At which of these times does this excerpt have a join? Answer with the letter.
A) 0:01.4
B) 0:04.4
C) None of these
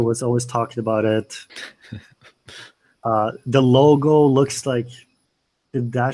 C